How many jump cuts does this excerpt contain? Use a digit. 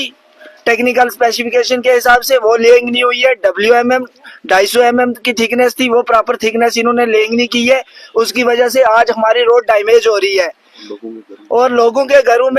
0